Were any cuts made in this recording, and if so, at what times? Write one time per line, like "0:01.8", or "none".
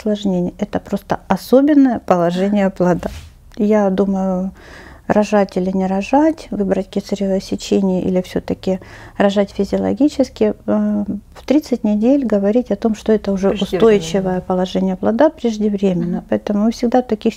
0:03.2